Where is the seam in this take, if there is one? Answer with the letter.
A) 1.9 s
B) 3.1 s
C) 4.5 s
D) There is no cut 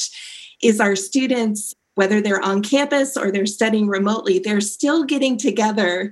A